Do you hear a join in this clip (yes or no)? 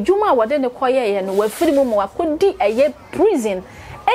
no